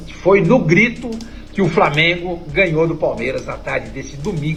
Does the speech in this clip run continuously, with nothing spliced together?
yes; 0 cuts

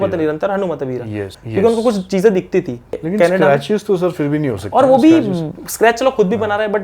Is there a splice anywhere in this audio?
yes; 2 cuts; at 1.3 s, 3.0 s

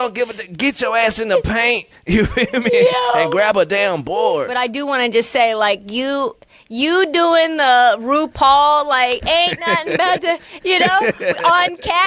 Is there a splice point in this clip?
yes; 1 cut; at 4.6 s

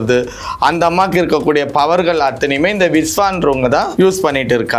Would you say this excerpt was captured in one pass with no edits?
no; 1 cut; at 3.9 s

